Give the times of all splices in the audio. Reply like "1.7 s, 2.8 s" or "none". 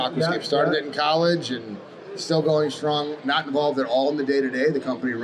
none